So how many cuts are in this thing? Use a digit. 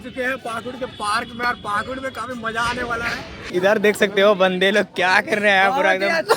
1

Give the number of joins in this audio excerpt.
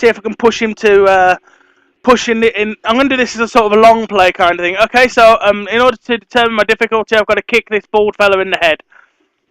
1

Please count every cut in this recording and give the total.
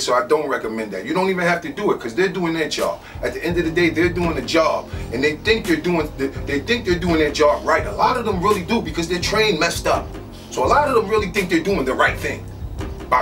0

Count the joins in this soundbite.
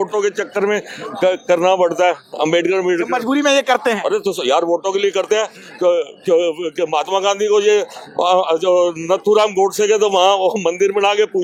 0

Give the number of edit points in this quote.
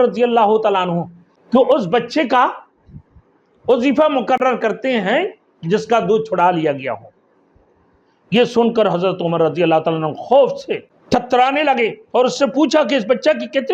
1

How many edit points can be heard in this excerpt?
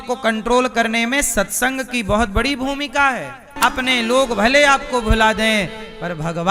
1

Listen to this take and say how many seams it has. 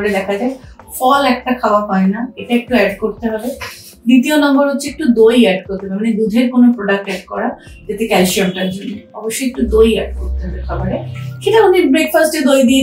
0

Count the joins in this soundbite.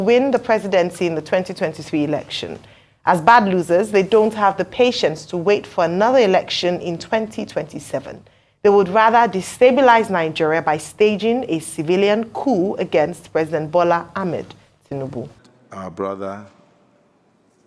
1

